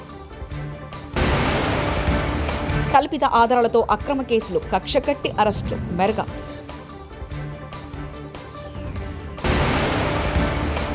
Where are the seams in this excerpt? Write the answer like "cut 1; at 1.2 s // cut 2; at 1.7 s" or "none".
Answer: cut 1; at 1.1 s // cut 2; at 2.7 s